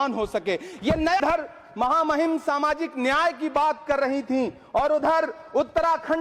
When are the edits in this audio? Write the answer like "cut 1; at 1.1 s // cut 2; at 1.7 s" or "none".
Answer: cut 1; at 1.2 s